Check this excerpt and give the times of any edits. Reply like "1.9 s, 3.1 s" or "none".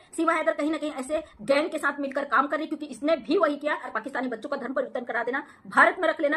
3.9 s